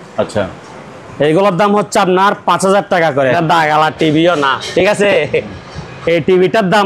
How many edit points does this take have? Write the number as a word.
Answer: one